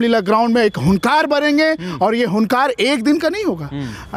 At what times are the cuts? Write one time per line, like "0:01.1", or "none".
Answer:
none